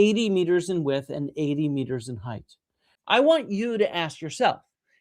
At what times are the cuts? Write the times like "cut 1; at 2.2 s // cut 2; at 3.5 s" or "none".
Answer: cut 1; at 2.9 s